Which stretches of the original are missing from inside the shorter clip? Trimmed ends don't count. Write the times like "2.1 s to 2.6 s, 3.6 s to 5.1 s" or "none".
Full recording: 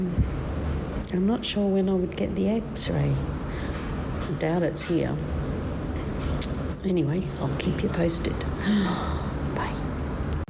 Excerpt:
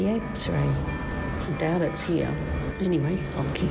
3.5 s to 3.9 s, 5.5 s to 6.8 s